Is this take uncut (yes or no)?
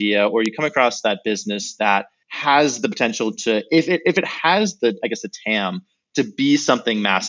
yes